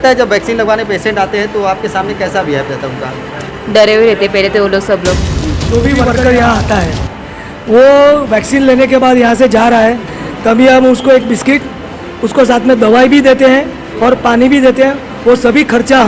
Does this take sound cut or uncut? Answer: cut